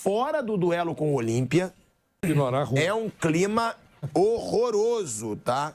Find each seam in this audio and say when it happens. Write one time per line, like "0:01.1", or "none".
0:02.2